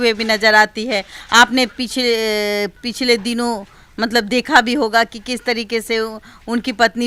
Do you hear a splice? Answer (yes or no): no